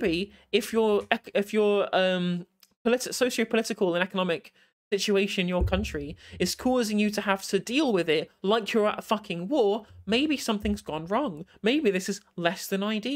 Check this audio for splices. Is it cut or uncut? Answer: uncut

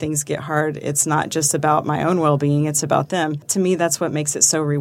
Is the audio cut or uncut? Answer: cut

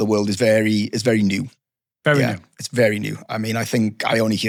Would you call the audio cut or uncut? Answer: uncut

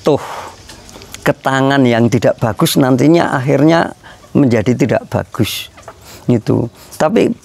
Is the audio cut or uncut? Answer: uncut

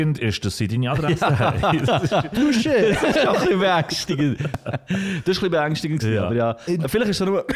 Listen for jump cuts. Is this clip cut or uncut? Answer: cut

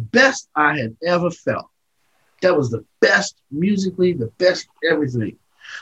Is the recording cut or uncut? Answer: uncut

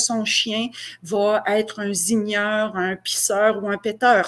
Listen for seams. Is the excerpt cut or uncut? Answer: uncut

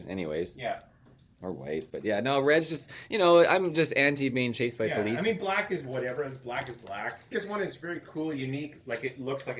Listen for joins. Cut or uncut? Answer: cut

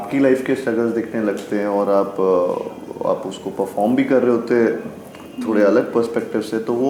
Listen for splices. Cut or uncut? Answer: uncut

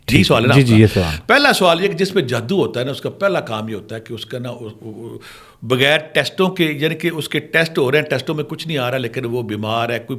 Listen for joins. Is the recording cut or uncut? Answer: uncut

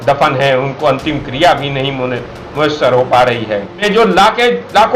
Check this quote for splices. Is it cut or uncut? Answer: cut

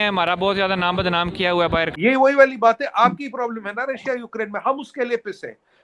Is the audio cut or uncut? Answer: cut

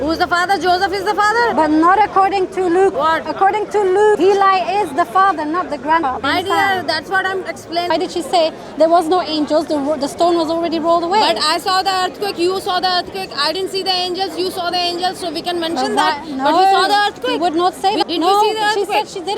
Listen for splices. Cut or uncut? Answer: cut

